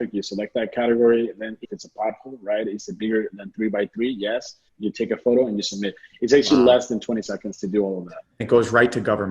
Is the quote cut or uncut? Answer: cut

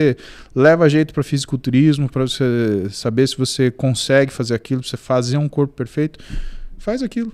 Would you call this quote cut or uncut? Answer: uncut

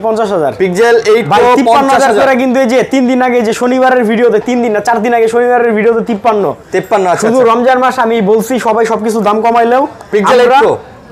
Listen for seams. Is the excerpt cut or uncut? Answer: uncut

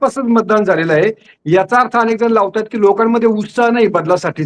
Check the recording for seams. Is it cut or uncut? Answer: uncut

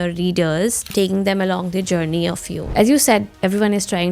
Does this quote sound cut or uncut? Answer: cut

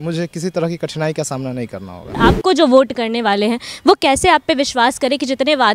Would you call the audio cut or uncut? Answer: cut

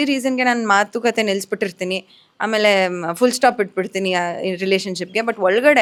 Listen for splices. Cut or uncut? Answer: uncut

